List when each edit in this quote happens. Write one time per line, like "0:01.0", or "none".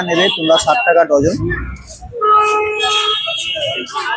none

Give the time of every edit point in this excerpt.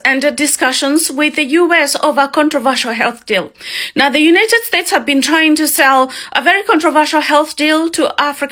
none

